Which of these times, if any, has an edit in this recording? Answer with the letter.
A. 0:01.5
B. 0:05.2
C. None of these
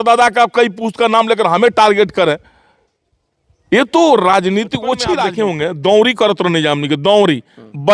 B